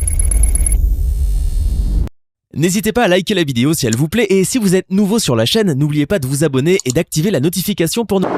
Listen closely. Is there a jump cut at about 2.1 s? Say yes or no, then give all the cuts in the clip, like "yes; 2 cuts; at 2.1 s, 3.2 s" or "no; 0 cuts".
no; 0 cuts